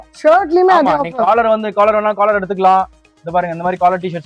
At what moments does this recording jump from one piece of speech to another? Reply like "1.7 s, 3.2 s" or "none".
none